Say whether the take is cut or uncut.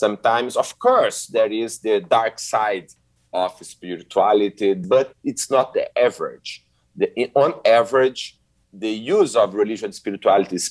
cut